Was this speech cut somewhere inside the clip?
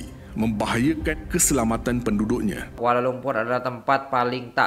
yes; 1 cut; at 2.8 s

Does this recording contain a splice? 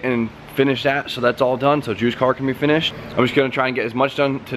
yes; 1 cut; at 0.9 s

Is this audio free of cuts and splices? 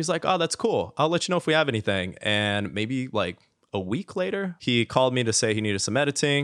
no; 1 cut; at 4.5 s

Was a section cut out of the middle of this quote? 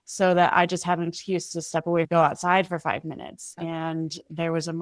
yes; 2 cuts; at 2.1 s, 3.5 s

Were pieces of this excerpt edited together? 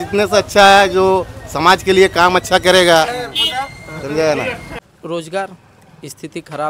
yes; 1 cut; at 4.7 s

